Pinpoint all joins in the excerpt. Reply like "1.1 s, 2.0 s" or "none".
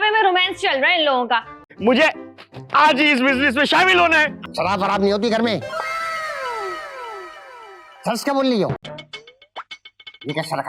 1.6 s, 4.4 s, 8.8 s